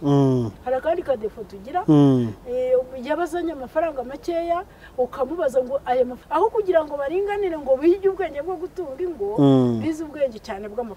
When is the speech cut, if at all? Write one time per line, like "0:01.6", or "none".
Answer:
0:06.2